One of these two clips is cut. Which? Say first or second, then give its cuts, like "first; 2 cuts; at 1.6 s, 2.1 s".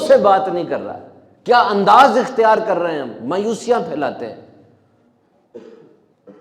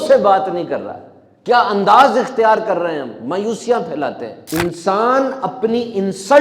second; 1 cut; at 4.3 s